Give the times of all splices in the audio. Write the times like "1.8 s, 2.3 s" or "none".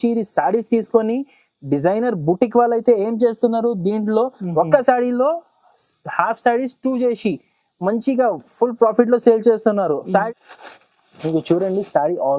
10.3 s